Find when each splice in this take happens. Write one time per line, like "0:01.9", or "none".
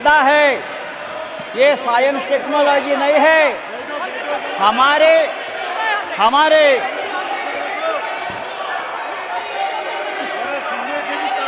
none